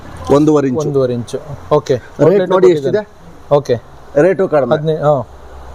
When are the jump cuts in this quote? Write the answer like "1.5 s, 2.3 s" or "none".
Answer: none

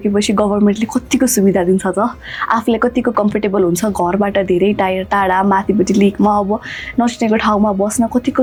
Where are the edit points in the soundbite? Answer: none

